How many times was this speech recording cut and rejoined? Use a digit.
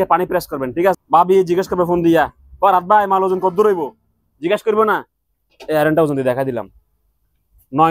1